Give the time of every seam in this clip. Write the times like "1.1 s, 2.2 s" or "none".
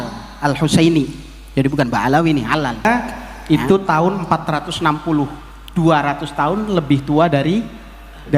2.8 s